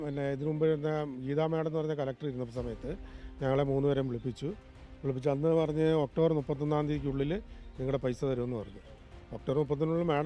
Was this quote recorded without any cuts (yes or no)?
yes